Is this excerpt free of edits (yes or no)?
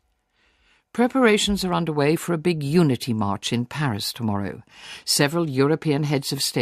no